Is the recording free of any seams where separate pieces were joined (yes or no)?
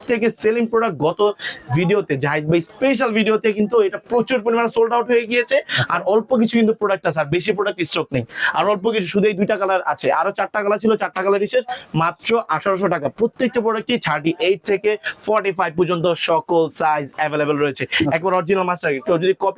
yes